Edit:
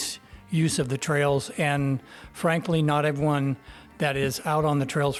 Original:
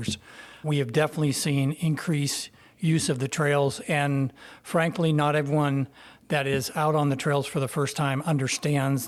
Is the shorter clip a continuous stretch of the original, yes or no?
yes